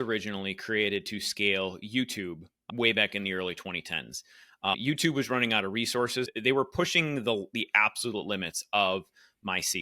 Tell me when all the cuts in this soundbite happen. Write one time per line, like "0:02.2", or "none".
0:06.3